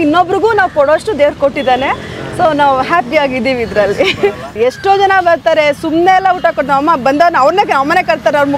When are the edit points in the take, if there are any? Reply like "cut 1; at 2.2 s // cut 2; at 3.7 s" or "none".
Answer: cut 1; at 4.5 s